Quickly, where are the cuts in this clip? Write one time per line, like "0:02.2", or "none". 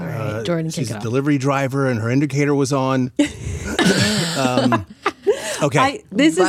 none

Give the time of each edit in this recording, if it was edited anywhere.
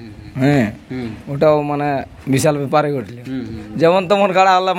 none

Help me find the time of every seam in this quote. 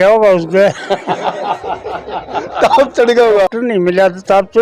0:03.5

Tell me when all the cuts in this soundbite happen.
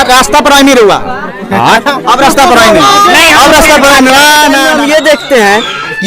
0:04.7

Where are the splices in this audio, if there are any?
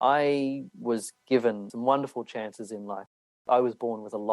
0:01.7
0:03.5

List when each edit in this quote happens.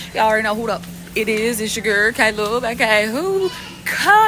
none

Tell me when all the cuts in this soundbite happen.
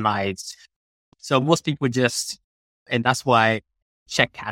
0:01.0

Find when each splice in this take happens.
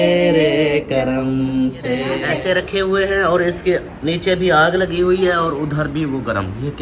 0:02.2

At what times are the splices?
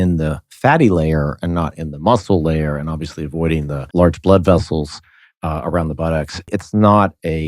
0:03.9
0:06.5

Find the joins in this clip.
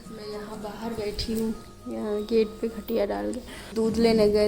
0:03.6

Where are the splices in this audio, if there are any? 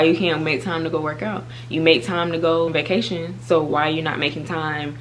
0:02.7

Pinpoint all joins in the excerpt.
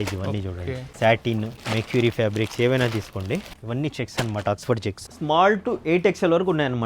0:00.9
0:01.6
0:03.6
0:05.1

